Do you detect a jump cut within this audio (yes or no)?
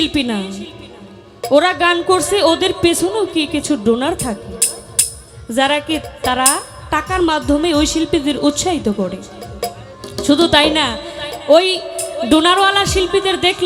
no